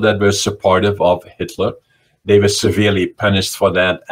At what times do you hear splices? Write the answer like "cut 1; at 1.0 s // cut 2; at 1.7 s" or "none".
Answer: none